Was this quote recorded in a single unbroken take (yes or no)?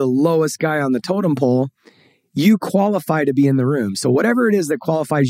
yes